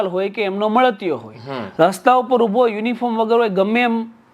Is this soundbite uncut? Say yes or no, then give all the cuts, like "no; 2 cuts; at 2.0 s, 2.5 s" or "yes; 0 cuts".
yes; 0 cuts